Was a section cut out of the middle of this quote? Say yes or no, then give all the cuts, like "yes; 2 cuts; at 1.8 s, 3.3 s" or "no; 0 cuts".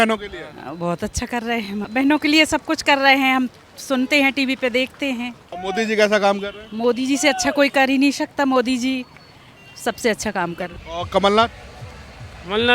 yes; 3 cuts; at 1.9 s, 5.5 s, 10.7 s